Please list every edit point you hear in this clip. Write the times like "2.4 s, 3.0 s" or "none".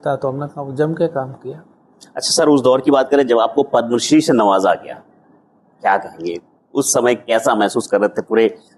none